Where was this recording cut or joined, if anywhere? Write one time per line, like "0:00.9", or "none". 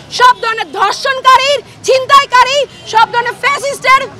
none